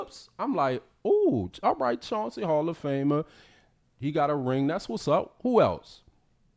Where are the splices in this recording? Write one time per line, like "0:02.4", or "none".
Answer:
none